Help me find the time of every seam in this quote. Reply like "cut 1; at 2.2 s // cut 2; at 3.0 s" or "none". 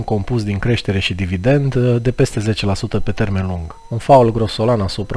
cut 1; at 3.7 s